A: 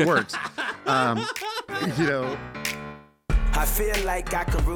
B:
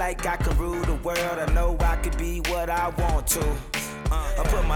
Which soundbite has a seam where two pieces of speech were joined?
A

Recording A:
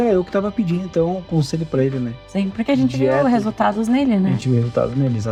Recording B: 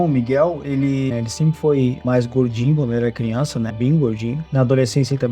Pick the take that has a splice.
B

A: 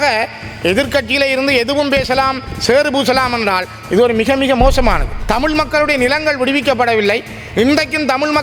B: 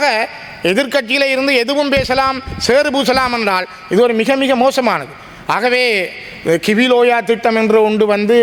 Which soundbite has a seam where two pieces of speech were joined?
A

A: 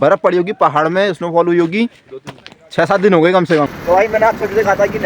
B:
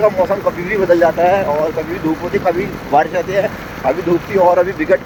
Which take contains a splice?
A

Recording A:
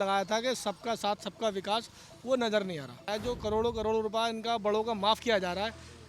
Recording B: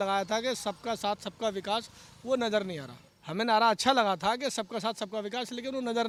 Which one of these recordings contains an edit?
A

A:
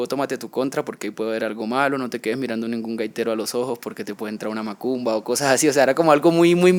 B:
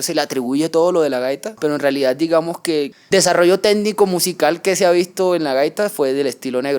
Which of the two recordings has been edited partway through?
B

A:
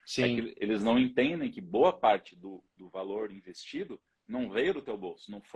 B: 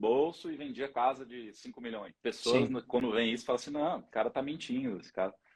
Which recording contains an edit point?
B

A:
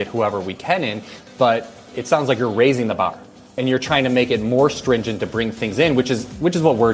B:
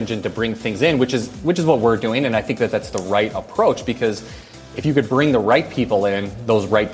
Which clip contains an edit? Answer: A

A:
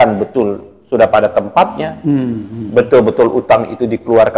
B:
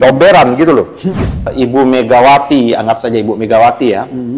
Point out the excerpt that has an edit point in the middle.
B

